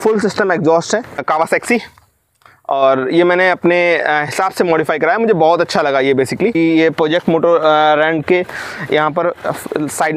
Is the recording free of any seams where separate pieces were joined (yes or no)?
no